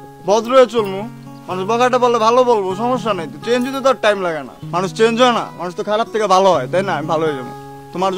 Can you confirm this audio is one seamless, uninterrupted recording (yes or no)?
yes